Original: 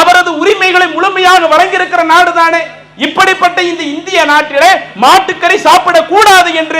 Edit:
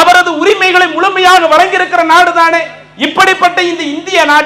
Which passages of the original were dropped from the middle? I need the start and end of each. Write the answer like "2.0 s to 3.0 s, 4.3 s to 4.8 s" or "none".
none